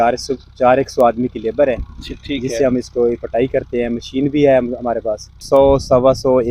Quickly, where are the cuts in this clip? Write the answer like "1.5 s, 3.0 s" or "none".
5.4 s